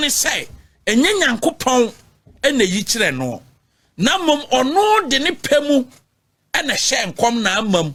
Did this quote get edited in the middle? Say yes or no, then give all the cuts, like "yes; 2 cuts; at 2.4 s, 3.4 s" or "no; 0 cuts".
no; 0 cuts